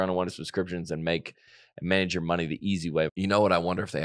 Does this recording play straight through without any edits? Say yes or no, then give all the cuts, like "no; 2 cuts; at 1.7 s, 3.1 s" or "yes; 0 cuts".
no; 1 cut; at 3.1 s